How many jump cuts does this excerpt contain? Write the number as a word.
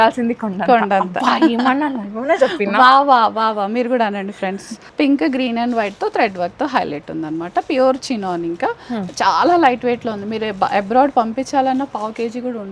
one